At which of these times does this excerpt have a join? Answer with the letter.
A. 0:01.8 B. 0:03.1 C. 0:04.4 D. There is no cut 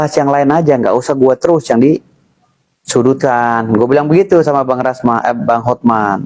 D